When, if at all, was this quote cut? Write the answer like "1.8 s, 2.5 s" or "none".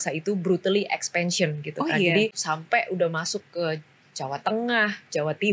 2.4 s